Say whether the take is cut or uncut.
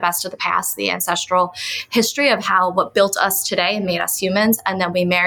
uncut